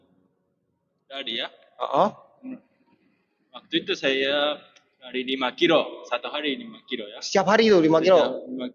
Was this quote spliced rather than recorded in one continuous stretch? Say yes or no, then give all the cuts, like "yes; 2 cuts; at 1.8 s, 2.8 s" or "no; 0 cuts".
no; 0 cuts